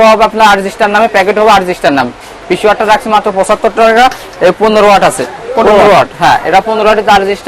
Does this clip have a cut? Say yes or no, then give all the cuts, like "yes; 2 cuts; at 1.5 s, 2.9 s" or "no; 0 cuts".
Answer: no; 0 cuts